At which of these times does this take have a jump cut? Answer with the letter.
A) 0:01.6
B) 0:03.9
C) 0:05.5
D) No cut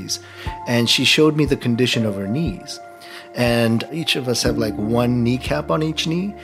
B